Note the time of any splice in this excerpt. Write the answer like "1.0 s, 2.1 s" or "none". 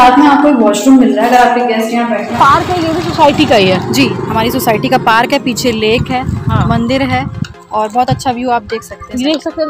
2.3 s